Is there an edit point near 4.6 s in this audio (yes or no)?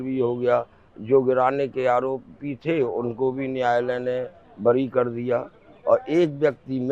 no